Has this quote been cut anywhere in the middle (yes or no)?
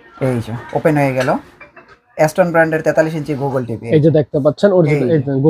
no